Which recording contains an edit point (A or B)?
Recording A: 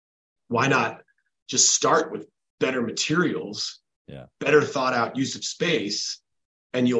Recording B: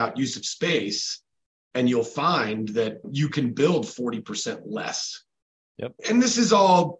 B